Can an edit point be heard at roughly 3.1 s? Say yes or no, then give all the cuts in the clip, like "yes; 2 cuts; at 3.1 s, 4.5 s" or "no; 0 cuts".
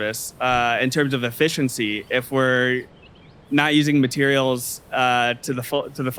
no; 0 cuts